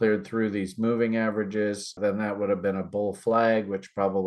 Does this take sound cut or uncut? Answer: cut